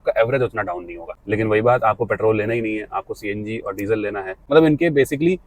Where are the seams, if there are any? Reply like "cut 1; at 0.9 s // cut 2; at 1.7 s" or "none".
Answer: cut 1; at 1.2 s // cut 2; at 4.4 s